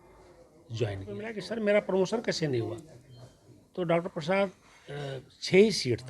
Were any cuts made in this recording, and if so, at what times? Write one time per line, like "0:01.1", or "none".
0:01.4